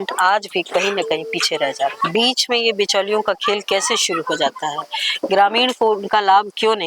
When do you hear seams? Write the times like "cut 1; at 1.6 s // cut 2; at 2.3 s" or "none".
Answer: cut 1; at 2.0 s

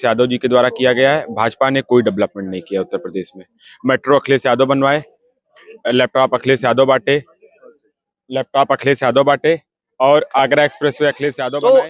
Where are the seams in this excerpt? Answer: none

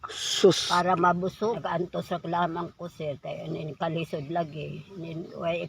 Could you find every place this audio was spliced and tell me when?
cut 1; at 1.4 s

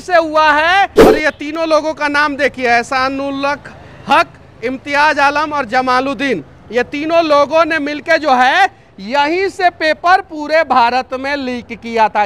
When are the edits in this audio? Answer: cut 1; at 1.0 s

